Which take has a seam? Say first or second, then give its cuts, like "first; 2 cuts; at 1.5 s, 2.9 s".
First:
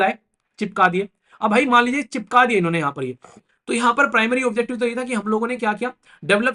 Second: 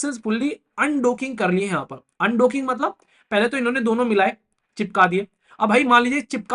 first; 1 cut; at 3.5 s